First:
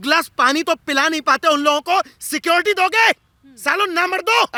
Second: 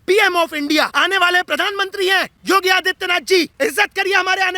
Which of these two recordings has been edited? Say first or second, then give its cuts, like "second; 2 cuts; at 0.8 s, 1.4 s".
second; 3 cuts; at 0.9 s, 2.3 s, 3.5 s